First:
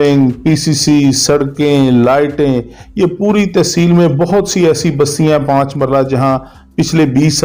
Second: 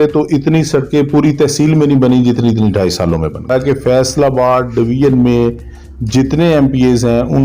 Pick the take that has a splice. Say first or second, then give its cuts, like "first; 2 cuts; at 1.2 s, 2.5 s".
second; 1 cut; at 3.5 s